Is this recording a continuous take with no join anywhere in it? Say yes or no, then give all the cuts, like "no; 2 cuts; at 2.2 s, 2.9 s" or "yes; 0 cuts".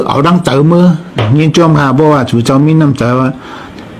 no; 1 cut; at 1.2 s